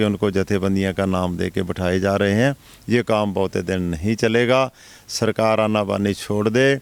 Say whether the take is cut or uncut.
uncut